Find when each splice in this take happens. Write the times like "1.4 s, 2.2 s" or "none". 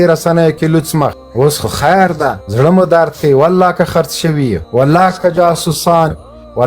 1.2 s, 2.4 s, 4.6 s